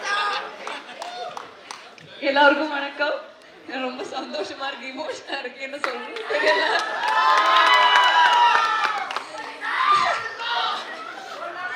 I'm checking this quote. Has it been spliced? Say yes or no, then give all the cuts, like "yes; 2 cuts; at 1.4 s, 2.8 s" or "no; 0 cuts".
no; 0 cuts